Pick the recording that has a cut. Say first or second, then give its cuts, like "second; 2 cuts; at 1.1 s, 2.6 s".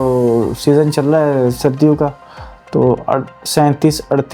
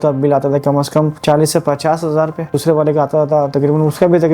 second; 2 cuts; at 1.2 s, 2.6 s